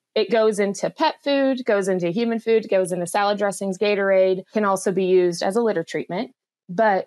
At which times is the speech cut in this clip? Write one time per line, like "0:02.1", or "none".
0:04.5